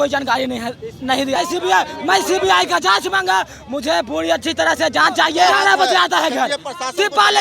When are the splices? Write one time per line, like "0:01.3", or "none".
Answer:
0:01.4
0:05.5